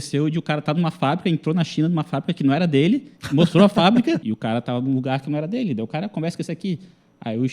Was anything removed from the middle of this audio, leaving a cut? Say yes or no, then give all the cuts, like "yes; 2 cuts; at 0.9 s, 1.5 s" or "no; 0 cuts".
yes; 1 cut; at 4.3 s